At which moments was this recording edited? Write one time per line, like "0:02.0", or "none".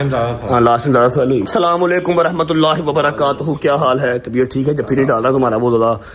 0:01.5